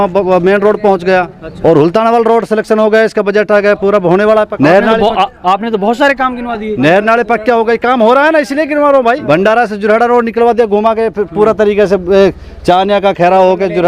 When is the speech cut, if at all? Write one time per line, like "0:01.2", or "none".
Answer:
0:01.4
0:04.5
0:09.2